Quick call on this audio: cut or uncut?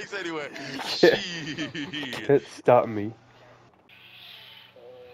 cut